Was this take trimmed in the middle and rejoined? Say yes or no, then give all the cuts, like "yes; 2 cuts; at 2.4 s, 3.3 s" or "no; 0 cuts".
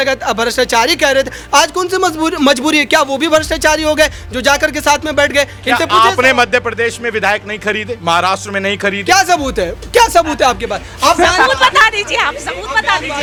no; 0 cuts